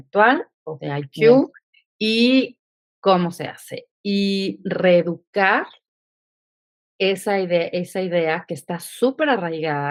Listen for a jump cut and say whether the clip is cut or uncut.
uncut